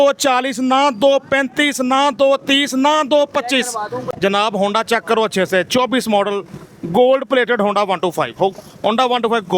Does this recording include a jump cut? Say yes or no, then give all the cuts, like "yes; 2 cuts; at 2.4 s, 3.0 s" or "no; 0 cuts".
yes; 1 cut; at 3.9 s